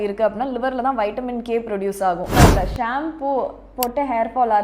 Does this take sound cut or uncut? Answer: cut